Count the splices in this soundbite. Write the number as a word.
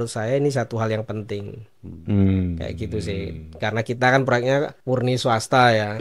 one